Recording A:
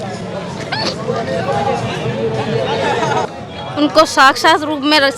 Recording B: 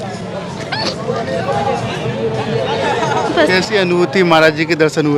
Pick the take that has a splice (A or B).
A